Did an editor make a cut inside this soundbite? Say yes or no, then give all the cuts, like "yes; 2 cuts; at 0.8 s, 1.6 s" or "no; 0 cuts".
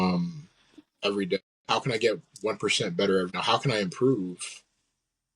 yes; 2 cuts; at 1.5 s, 3.4 s